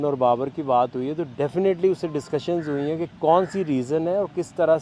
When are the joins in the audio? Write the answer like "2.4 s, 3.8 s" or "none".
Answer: 1.3 s, 3.1 s

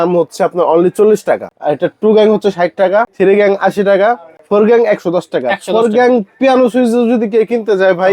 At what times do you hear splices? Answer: 1.5 s, 3.1 s, 4.3 s

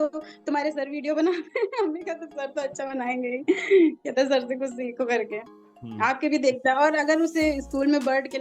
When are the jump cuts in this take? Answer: none

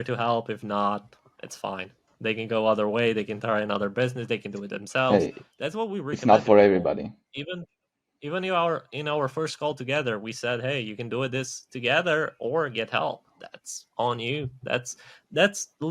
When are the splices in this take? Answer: none

